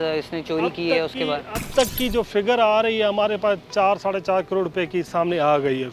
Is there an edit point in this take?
no; 0 cuts

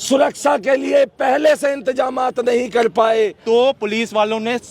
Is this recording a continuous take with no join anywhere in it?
no; 1 cut; at 3.4 s

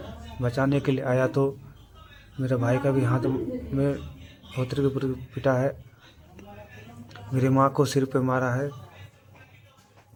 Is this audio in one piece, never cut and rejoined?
yes; 0 cuts

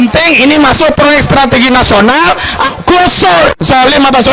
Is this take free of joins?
no; 1 cut; at 2.7 s

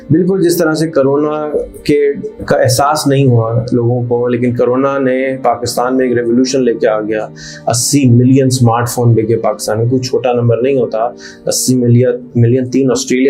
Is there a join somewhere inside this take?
no; 0 cuts

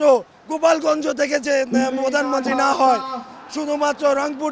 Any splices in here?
no; 0 cuts

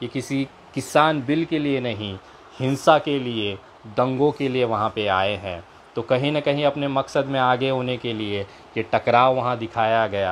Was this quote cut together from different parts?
no; 0 cuts

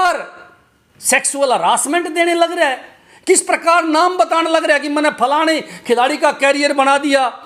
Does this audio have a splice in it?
no; 0 cuts

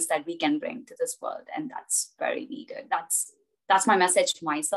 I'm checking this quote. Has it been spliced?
no; 0 cuts

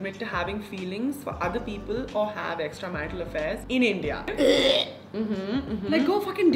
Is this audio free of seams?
yes; 0 cuts

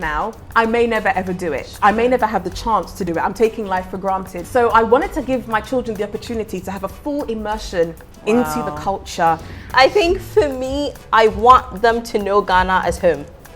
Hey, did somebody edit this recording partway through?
yes; 2 cuts; at 4.3 s, 9.6 s

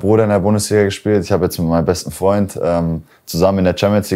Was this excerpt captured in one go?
yes; 0 cuts

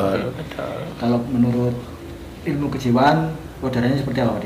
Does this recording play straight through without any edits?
yes; 0 cuts

